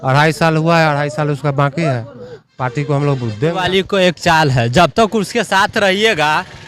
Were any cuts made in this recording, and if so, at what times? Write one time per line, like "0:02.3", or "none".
0:03.5